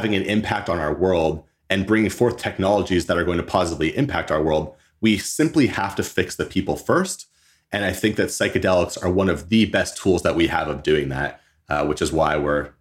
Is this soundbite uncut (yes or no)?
yes